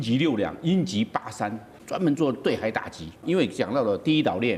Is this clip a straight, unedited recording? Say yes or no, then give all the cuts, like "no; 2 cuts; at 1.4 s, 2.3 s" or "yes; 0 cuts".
no; 2 cuts; at 1.8 s, 3.2 s